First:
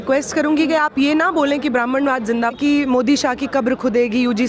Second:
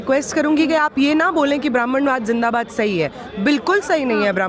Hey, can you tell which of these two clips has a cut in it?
first; 1 cut; at 2.5 s

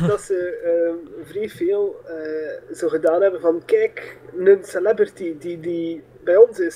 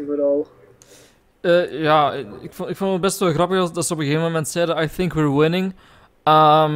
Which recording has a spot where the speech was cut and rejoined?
second; 1 cut; at 4.5 s

